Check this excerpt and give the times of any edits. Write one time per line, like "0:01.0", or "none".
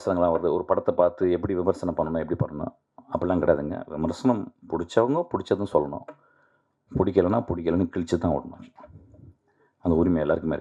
none